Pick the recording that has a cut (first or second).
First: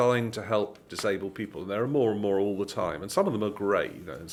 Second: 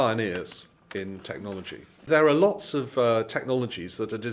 second